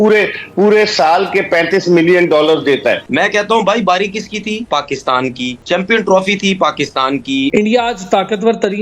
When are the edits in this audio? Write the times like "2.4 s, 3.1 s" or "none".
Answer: 3.0 s, 7.5 s